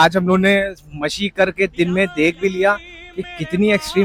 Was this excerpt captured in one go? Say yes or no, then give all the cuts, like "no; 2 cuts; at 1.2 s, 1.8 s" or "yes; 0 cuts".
yes; 0 cuts